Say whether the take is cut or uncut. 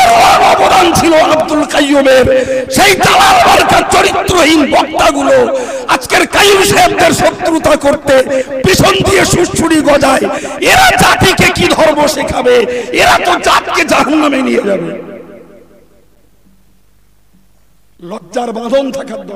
uncut